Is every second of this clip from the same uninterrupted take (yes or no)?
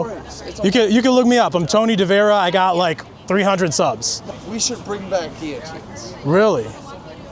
no